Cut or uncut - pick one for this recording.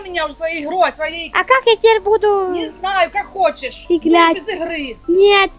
uncut